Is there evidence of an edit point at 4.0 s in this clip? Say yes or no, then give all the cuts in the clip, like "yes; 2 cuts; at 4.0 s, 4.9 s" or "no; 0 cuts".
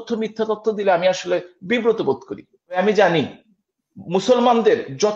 no; 1 cut; at 2.8 s